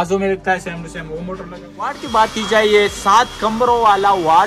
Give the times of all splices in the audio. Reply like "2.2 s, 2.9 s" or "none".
2.0 s

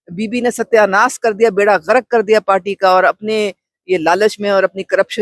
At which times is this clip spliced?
none

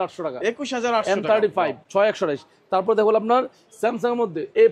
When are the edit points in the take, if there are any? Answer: none

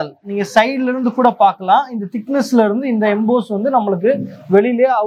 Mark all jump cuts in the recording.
none

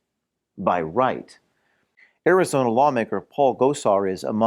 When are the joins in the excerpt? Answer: 1.9 s

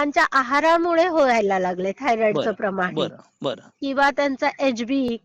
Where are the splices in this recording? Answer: none

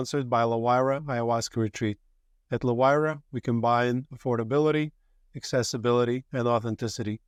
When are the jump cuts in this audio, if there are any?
none

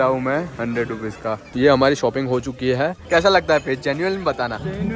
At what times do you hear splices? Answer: 1.5 s, 3.0 s

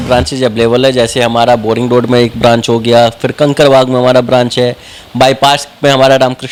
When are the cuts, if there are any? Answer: none

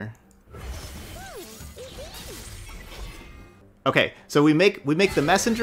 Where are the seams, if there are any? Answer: 3.6 s

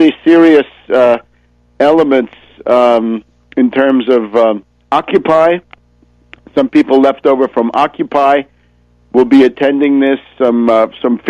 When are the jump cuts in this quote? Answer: none

